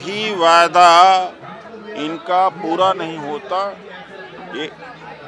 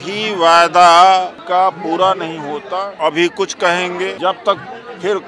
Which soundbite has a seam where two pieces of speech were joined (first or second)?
second